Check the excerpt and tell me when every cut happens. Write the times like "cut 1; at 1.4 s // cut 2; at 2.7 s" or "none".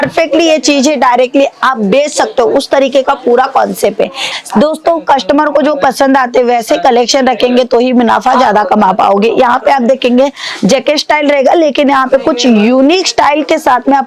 cut 1; at 4.3 s